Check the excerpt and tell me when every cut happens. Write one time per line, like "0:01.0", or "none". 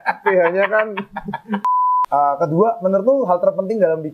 0:01.8